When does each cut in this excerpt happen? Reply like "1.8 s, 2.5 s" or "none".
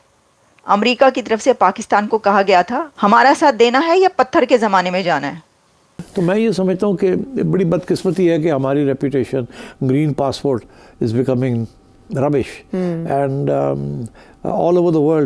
2.9 s, 6.0 s